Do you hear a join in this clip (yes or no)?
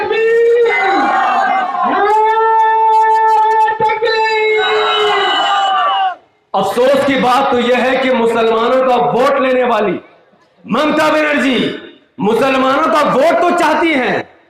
no